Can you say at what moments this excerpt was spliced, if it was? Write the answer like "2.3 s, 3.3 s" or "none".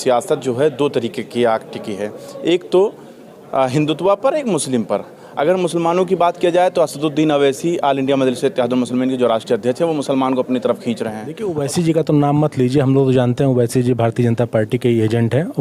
11.4 s